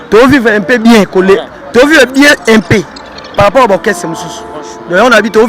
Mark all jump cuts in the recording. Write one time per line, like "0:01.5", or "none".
none